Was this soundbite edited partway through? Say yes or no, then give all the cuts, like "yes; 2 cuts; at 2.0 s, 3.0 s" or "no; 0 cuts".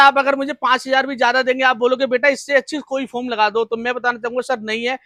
no; 0 cuts